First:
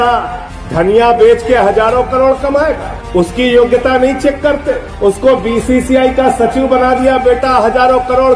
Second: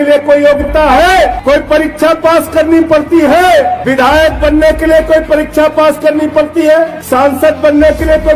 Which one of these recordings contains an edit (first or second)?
second